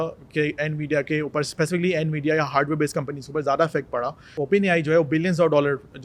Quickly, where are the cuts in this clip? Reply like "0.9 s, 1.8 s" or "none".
4.3 s